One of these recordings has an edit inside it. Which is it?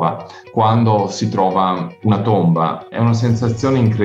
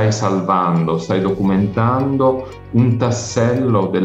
first; 1 cut; at 2.9 s

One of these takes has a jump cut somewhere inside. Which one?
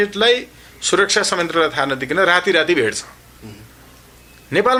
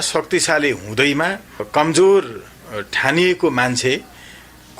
second; 1 cut; at 1.7 s

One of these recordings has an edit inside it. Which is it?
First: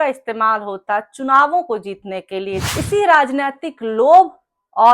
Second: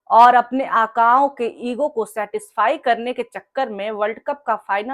first; 1 cut; at 2.6 s

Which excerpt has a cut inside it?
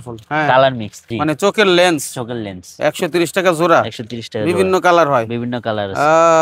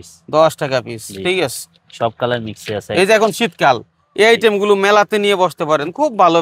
first; 1 cut; at 1.0 s

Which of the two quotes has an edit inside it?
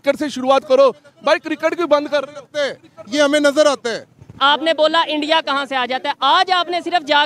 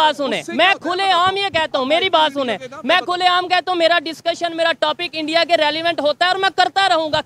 first; 1 cut; at 4.4 s

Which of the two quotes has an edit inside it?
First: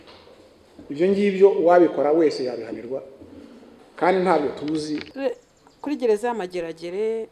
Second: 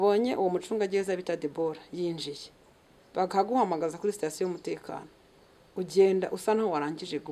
first; 1 cut; at 5.1 s

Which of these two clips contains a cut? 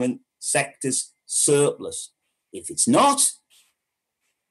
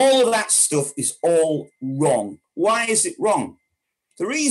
second; 1 cut; at 2.4 s

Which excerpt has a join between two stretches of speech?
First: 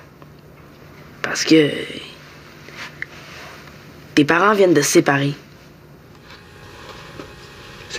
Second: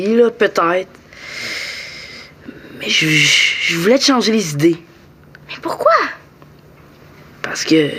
first; 1 cut; at 6.3 s

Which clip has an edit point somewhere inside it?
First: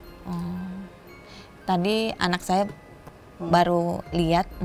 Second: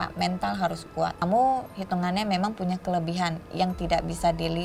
second; 1 cut; at 1.2 s

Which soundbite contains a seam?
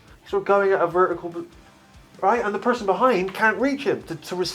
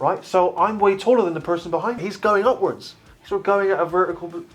second; 1 cut; at 2.1 s

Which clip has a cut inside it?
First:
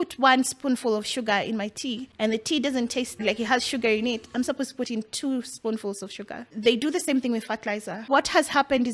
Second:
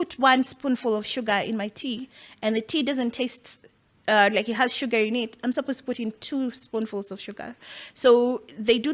first; 4 cuts; at 2.1 s, 3.2 s, 6.5 s, 8.1 s

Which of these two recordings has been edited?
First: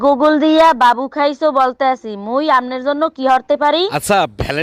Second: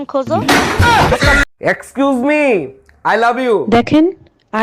second; 1 cut; at 1.5 s

